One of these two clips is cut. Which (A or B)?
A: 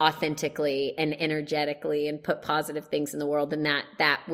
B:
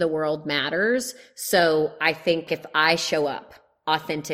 B